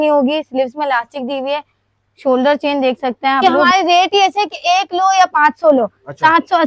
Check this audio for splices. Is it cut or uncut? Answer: cut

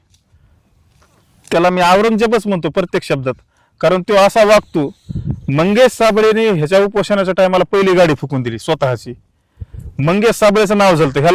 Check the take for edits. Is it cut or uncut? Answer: uncut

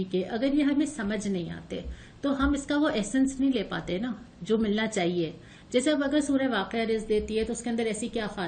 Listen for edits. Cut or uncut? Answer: uncut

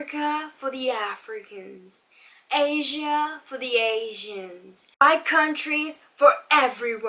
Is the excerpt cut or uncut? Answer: uncut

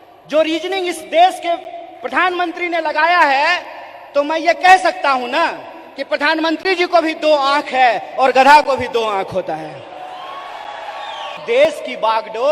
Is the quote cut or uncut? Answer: cut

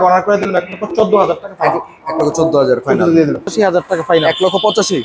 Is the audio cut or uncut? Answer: cut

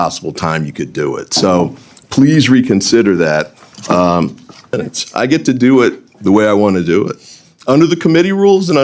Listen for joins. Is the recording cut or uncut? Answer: cut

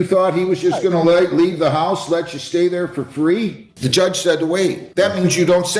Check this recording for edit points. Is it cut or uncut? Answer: cut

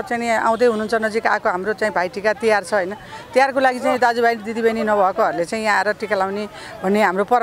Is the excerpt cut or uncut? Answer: uncut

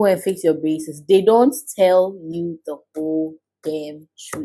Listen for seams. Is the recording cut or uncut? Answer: uncut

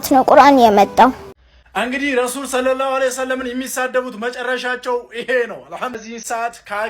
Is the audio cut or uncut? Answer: cut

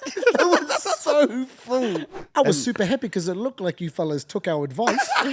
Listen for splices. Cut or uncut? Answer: cut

